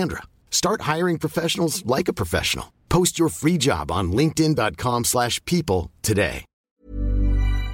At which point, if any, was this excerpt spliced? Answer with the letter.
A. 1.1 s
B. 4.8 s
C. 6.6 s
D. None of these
C